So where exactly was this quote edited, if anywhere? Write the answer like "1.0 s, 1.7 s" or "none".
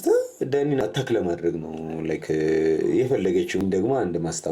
0.8 s, 3.6 s